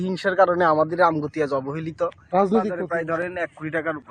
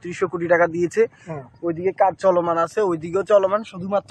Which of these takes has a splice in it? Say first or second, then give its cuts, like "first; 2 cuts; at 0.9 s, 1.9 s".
first; 1 cut; at 2.8 s